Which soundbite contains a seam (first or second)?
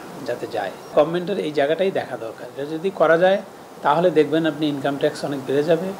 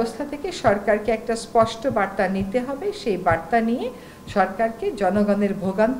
first